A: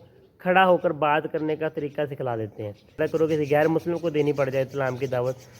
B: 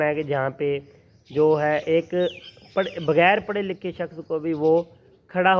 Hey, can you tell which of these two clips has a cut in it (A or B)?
A